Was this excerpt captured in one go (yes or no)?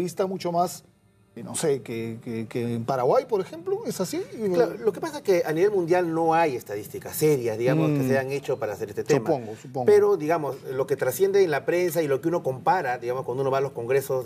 yes